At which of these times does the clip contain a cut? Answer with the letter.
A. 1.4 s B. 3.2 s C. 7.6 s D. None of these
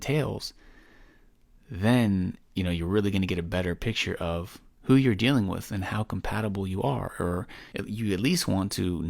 C